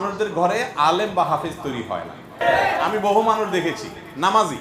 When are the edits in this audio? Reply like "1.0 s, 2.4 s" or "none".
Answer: 2.4 s